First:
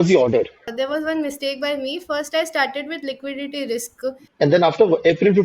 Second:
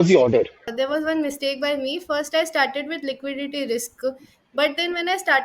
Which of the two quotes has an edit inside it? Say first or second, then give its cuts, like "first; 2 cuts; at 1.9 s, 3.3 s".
first; 1 cut; at 4.2 s